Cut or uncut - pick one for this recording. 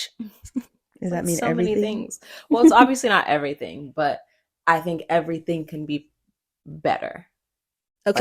uncut